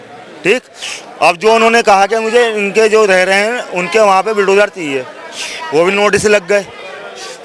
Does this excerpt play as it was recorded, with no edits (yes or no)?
yes